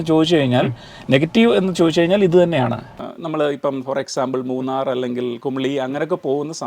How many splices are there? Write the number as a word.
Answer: one